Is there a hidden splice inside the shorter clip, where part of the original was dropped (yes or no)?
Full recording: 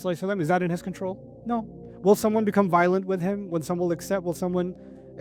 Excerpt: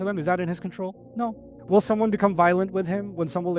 yes